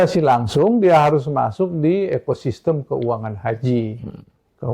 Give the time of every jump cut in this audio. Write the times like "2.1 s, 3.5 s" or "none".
none